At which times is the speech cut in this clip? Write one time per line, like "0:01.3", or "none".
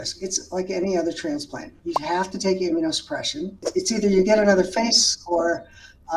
0:03.6